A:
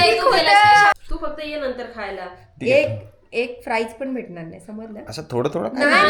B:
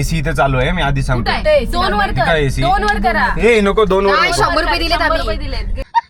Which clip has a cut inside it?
A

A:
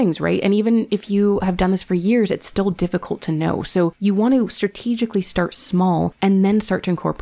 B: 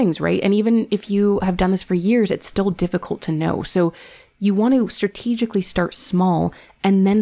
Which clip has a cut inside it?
A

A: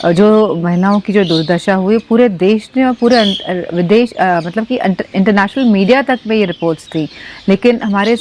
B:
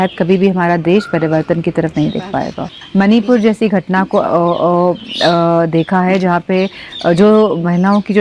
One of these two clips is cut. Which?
B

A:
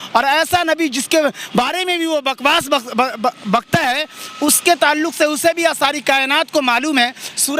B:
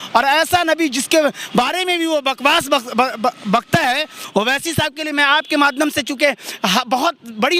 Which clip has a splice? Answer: B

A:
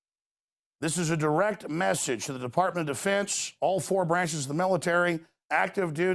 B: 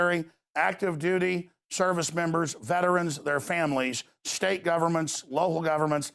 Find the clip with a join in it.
B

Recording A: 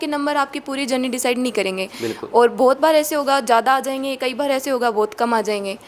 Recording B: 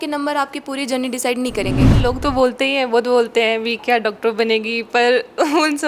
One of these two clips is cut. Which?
B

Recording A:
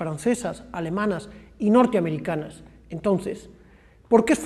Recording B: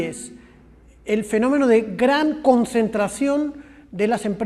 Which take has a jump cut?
B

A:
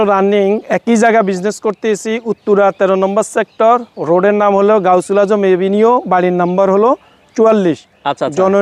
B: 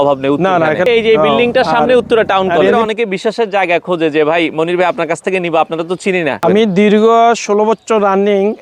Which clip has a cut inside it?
B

